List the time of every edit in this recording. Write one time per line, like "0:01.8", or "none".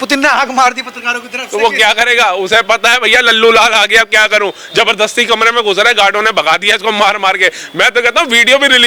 none